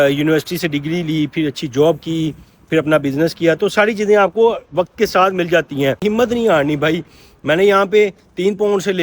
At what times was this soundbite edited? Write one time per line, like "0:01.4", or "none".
0:06.0